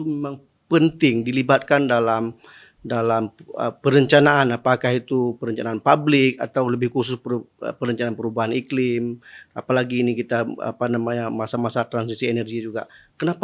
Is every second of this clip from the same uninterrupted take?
yes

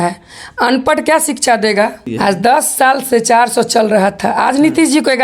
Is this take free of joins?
no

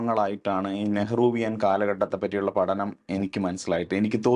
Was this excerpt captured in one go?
yes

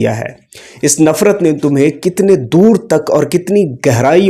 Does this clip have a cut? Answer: no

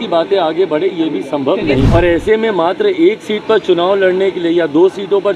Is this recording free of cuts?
no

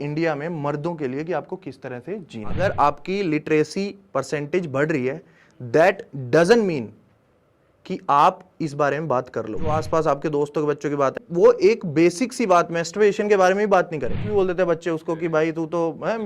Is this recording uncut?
no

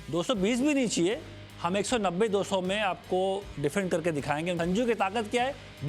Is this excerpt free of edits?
no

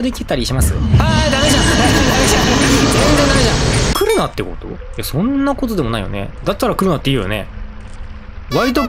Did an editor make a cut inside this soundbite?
yes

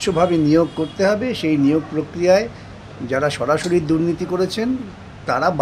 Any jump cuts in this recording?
no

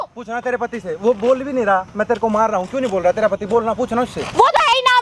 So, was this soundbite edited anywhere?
no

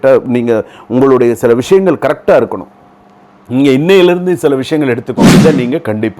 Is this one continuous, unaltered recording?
no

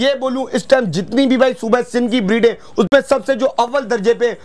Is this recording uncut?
yes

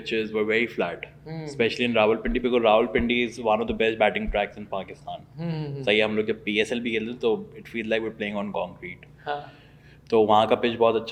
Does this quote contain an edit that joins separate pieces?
no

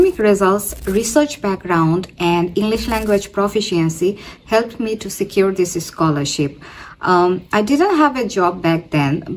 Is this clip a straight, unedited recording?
yes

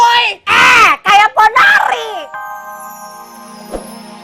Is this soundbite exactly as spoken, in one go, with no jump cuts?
no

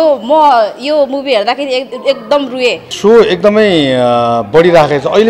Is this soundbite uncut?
no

